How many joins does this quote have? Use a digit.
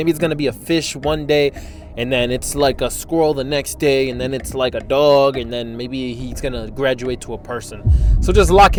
0